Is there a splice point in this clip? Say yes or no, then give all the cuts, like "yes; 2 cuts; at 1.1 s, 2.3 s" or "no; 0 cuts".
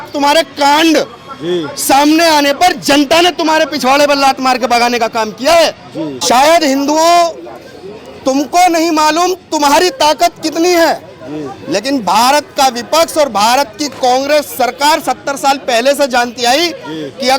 yes; 1 cut; at 6.2 s